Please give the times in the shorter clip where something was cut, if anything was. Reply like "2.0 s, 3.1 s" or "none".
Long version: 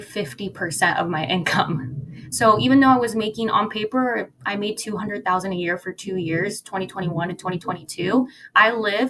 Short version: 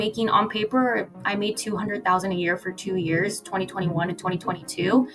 none